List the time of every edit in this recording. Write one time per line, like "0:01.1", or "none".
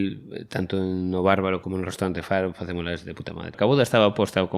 0:01.6
0:03.5

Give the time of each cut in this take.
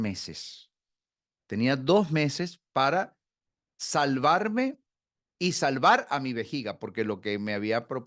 none

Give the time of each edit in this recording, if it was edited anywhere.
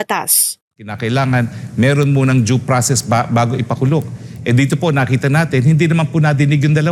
none

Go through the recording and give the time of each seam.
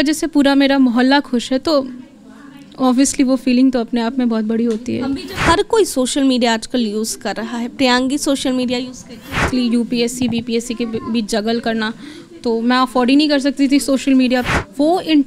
0:05.3
0:09.5
0:14.4

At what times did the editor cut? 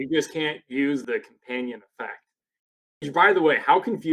0:01.0

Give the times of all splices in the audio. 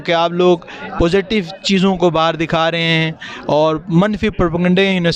none

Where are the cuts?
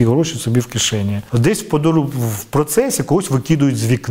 0:01.2

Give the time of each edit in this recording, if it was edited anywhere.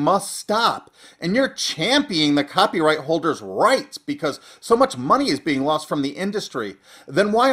0:02.0

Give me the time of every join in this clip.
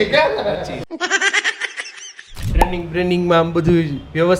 0:02.4

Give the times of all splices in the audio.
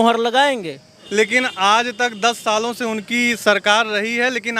0:00.9

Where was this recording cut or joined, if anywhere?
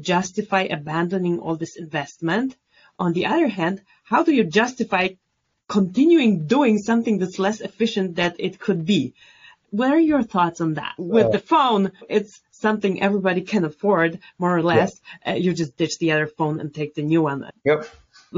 0:11.0
0:17.5

